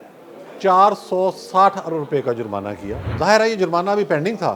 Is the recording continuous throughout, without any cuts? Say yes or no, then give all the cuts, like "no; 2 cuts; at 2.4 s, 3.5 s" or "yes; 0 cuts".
no; 1 cut; at 3.0 s